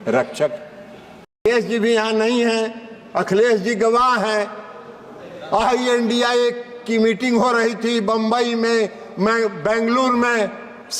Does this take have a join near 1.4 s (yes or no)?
yes